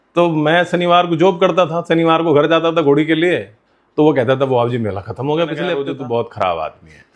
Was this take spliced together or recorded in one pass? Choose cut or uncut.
cut